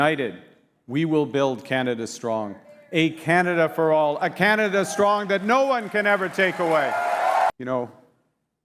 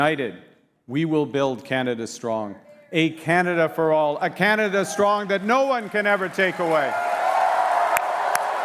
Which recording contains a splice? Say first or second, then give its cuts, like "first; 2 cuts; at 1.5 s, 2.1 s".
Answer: first; 1 cut; at 7.6 s